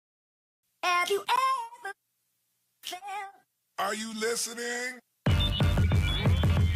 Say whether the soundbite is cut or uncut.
cut